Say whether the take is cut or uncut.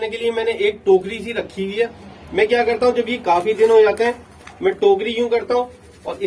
uncut